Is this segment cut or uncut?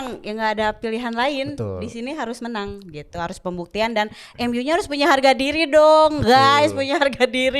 uncut